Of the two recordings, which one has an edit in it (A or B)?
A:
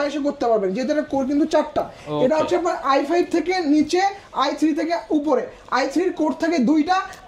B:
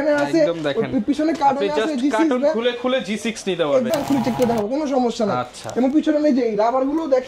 B